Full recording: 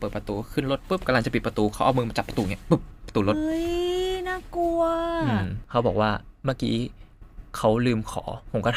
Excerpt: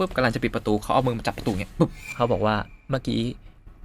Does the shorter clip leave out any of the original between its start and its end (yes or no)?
yes